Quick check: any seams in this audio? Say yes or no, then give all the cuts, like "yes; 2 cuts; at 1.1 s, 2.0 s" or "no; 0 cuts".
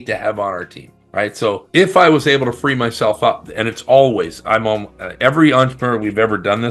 no; 0 cuts